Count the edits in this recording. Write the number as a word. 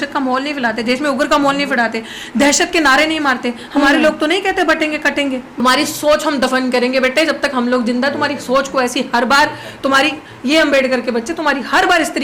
one